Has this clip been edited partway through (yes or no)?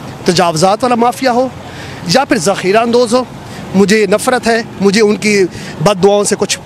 no